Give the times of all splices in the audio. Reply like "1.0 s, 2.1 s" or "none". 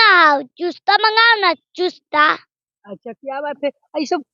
none